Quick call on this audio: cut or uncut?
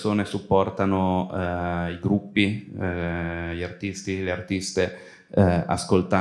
uncut